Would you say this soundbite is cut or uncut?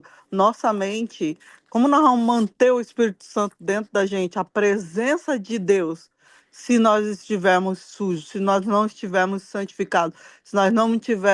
uncut